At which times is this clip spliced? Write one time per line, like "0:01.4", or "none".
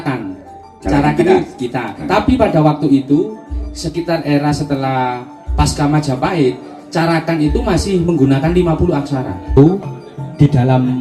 0:09.5

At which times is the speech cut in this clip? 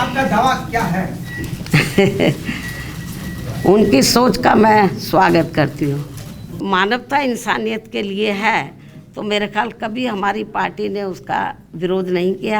0:06.6

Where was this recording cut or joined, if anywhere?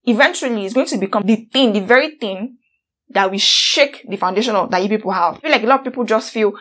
0:01.2
0:05.4

